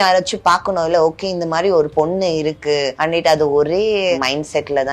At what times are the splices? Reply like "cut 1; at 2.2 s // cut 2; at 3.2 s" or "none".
cut 1; at 2.9 s // cut 2; at 4.2 s